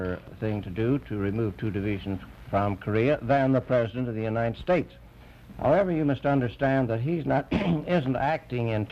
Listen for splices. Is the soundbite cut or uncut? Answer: uncut